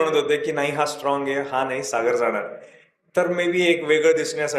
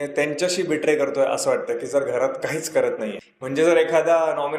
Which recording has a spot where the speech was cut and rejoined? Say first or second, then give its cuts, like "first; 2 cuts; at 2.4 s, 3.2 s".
second; 1 cut; at 3.2 s